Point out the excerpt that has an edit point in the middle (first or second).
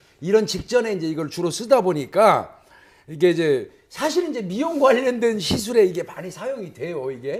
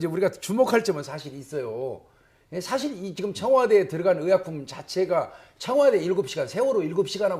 second